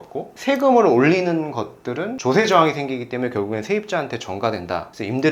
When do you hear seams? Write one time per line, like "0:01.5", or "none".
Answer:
0:02.1